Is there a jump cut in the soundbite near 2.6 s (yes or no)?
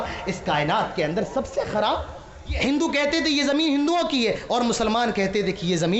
yes